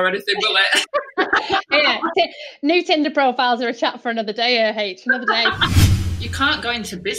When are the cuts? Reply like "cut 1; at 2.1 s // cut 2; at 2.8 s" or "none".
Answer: cut 1; at 5.7 s

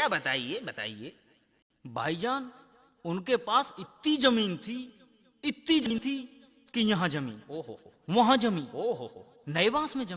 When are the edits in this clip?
cut 1; at 5.9 s

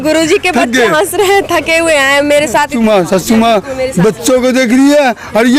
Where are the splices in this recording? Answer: cut 1; at 2.7 s

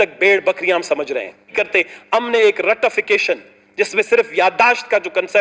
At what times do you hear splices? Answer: cut 1; at 1.5 s

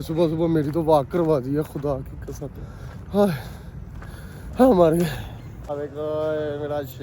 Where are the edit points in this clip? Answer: cut 1; at 5.7 s

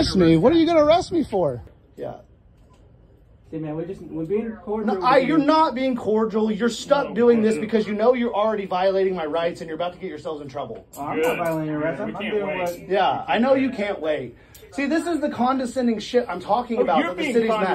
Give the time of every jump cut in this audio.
cut 1; at 1.6 s

